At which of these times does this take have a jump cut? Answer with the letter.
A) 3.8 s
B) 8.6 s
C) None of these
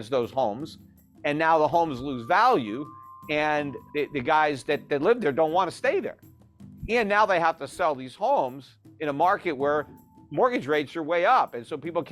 A